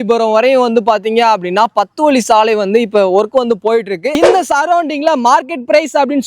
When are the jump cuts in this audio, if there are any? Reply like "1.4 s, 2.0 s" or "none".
4.2 s